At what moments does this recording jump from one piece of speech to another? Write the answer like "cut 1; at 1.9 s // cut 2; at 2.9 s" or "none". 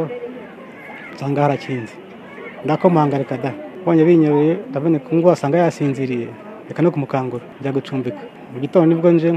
cut 1; at 3.7 s // cut 2; at 7.5 s // cut 3; at 8.4 s